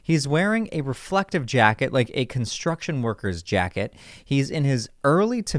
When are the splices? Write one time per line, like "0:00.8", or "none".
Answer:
none